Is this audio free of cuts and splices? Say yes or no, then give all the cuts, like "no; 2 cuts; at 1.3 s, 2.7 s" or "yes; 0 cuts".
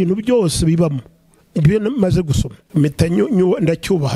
no; 1 cut; at 2.6 s